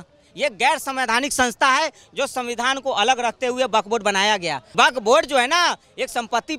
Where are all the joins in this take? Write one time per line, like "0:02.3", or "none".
0:04.6